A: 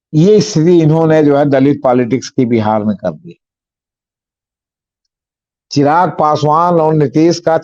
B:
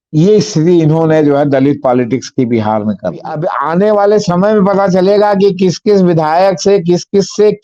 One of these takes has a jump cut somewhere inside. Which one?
B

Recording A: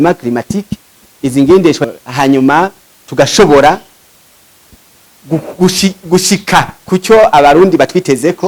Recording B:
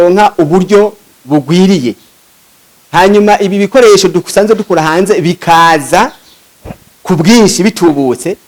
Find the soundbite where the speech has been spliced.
A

